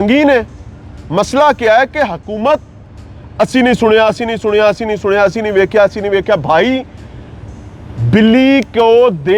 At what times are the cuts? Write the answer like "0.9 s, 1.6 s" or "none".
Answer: none